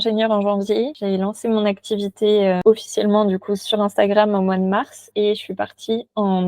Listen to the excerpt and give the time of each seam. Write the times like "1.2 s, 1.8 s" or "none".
2.6 s, 3.6 s